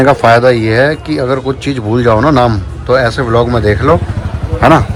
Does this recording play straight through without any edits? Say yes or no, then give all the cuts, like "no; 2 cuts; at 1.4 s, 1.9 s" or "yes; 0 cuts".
yes; 0 cuts